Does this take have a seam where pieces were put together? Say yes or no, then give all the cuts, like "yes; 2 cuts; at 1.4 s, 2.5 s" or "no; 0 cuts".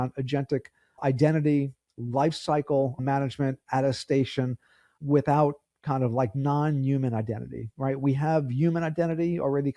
yes; 3 cuts; at 1.0 s, 3.0 s, 4.9 s